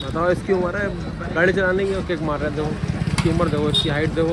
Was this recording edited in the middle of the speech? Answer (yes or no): no